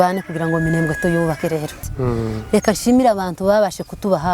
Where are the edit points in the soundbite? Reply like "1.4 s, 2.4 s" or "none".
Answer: 1.8 s

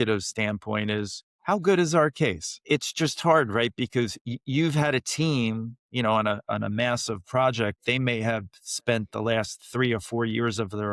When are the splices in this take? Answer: 1.2 s, 2.6 s

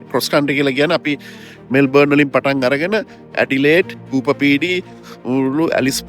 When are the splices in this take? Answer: 4.0 s

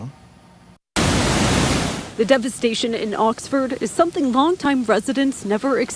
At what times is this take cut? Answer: 2.5 s

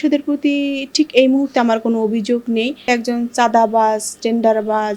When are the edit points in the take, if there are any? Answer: 2.9 s

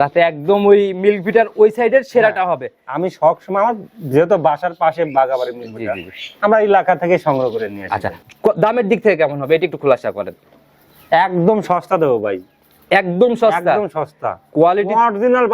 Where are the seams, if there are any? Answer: 8.2 s

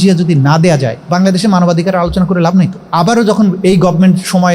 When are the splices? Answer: 1.0 s, 2.8 s

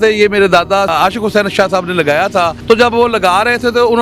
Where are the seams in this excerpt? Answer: 0.9 s, 2.6 s

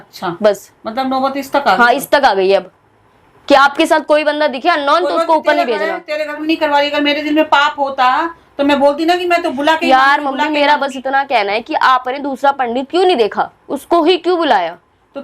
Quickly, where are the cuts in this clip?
6.4 s

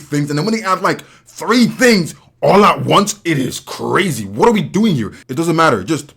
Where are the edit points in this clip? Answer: 5.1 s

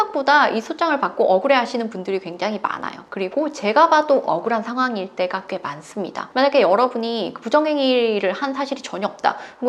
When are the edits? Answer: none

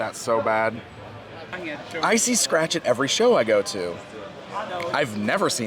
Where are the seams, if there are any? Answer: 1.6 s

